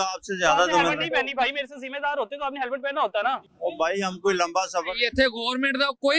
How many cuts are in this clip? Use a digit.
1